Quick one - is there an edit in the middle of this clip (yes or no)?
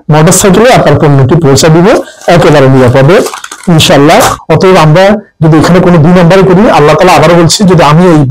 yes